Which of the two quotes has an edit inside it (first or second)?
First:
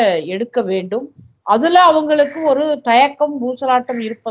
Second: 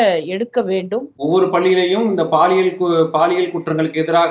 second